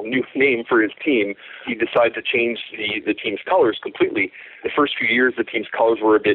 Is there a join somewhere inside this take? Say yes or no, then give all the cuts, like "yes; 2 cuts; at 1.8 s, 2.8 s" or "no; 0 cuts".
yes; 2 cuts; at 1.6 s, 4.6 s